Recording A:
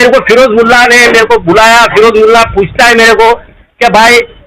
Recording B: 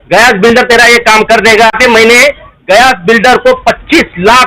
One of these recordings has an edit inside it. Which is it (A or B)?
B